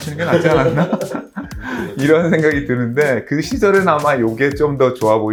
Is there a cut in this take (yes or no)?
no